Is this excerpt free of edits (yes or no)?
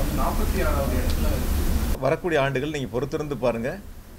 no